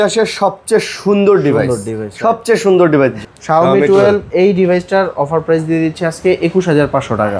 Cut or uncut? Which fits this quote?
cut